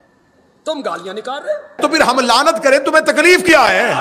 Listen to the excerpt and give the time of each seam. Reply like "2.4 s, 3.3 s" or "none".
1.8 s